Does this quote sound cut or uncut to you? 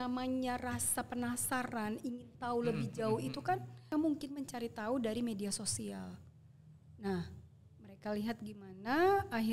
cut